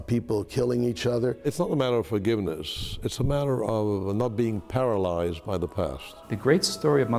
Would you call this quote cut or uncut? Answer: cut